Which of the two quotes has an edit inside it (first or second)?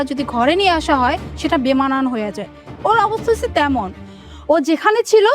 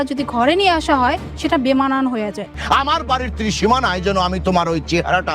second